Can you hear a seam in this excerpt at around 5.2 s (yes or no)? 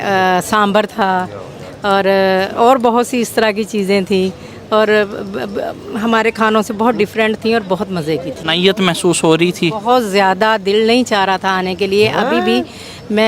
no